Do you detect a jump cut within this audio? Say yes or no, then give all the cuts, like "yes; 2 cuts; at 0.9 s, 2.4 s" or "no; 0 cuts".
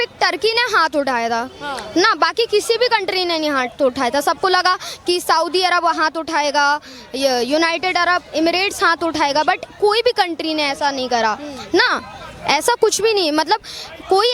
no; 0 cuts